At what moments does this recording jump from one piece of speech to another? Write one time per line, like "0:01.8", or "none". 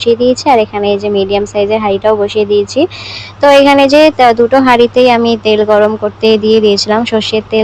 none